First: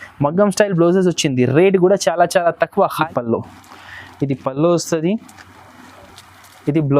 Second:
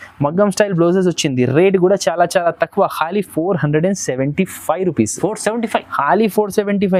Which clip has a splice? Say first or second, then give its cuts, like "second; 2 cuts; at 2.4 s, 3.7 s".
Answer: first; 1 cut; at 3.1 s